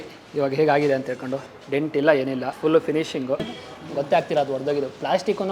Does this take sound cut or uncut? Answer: cut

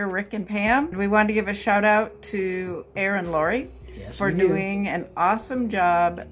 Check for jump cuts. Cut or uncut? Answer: cut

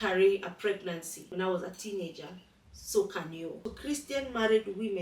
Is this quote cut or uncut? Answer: cut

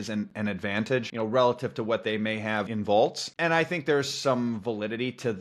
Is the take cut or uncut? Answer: cut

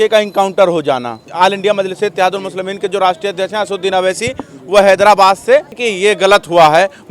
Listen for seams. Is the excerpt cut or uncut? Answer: cut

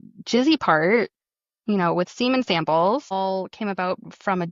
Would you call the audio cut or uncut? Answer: uncut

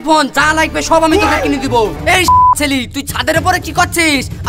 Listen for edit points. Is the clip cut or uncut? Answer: cut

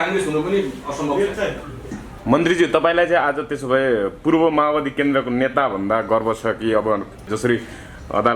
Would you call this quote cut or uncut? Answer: cut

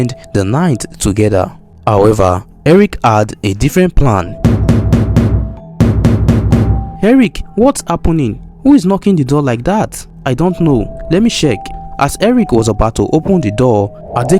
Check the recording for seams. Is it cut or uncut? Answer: cut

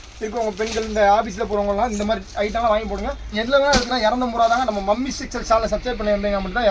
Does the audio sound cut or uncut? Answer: cut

